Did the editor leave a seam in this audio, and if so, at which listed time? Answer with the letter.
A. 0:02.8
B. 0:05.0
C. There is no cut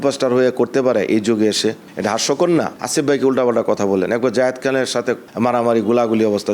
A